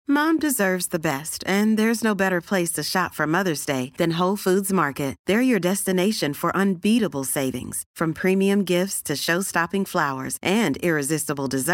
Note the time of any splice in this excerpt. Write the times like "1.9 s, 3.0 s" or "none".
none